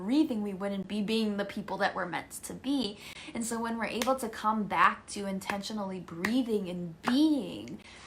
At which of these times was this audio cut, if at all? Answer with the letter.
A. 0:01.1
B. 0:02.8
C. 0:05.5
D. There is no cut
D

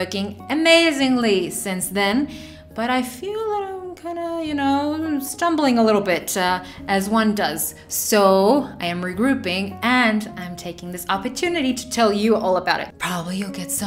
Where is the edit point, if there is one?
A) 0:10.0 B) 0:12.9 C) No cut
B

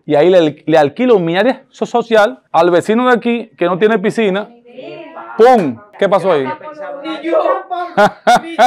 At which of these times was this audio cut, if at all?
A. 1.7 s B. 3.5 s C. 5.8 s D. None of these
C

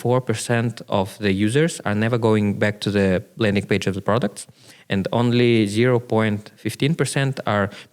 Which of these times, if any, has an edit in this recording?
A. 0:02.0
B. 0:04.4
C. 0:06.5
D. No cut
D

